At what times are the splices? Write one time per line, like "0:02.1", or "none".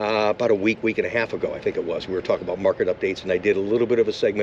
none